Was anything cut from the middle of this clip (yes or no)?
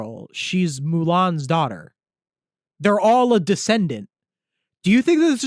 no